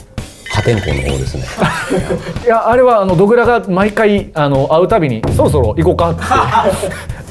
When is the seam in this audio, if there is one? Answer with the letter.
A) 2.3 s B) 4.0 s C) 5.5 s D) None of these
A